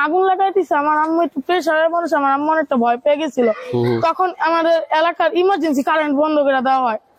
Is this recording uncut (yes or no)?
yes